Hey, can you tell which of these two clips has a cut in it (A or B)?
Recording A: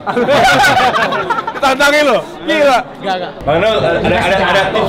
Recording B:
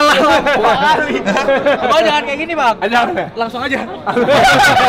A